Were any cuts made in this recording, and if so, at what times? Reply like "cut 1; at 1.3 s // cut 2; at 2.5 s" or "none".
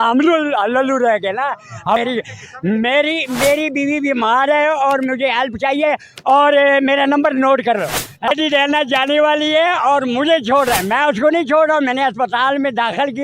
cut 1; at 2.0 s // cut 2; at 8.3 s